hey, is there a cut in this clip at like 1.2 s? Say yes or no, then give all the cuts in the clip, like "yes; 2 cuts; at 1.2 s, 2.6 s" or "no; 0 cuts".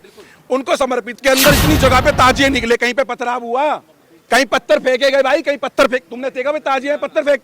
yes; 1 cut; at 1.2 s